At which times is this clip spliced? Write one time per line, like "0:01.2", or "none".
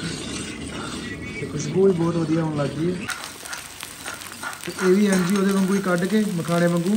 0:03.1